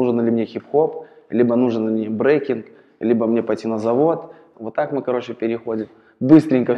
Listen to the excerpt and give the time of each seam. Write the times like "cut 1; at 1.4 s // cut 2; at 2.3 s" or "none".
cut 1; at 4.4 s